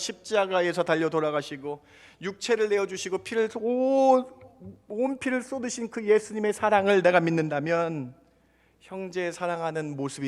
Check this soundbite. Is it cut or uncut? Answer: uncut